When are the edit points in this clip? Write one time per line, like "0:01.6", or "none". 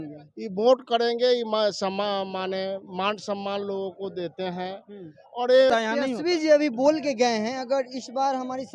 0:05.7